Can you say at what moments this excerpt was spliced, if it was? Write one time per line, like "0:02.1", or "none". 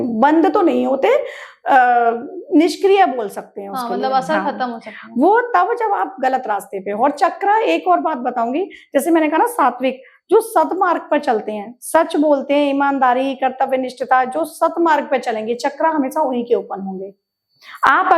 none